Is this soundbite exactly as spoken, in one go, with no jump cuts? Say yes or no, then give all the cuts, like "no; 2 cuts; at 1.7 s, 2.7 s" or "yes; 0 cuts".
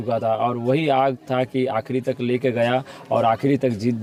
yes; 0 cuts